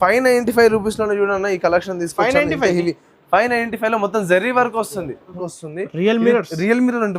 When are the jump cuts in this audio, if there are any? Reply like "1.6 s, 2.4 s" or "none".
5.4 s